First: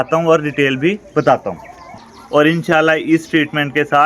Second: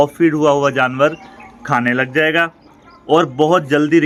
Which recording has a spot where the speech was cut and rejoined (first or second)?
first